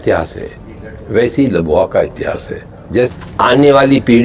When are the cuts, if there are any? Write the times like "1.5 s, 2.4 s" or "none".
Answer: 3.1 s